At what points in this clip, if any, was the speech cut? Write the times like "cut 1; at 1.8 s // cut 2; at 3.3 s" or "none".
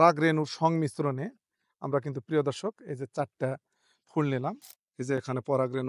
cut 1; at 4.7 s